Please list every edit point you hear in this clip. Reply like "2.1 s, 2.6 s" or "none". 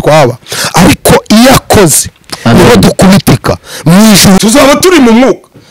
4.4 s